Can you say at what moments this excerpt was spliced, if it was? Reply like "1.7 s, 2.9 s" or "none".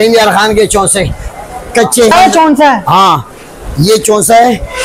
2.1 s